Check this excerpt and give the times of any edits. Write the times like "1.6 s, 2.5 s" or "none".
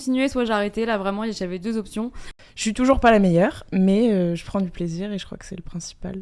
2.3 s